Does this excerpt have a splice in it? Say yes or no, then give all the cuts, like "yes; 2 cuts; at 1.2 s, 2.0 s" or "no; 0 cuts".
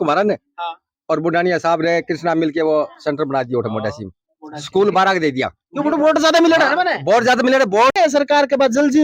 yes; 1 cut; at 7.9 s